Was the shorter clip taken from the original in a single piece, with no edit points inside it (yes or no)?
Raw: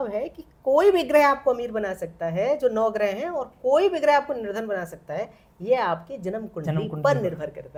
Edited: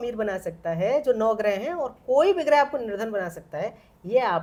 yes